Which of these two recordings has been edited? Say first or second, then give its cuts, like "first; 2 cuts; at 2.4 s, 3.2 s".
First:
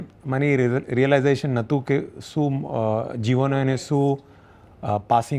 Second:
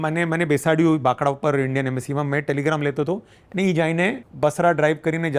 second; 1 cut; at 4.3 s